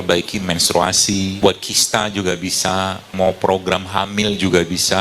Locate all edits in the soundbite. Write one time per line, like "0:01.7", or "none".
0:01.4
0:03.1